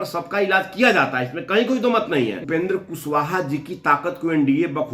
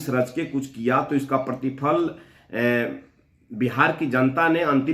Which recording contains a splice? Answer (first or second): first